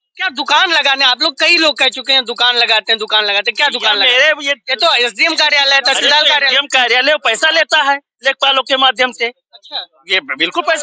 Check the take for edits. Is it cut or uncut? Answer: uncut